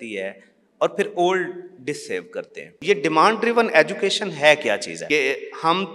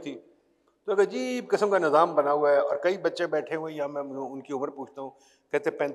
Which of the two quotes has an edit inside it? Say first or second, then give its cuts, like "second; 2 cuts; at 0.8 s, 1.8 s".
first; 2 cuts; at 2.8 s, 4.9 s